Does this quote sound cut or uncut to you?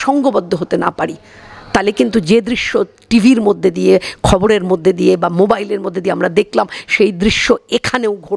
uncut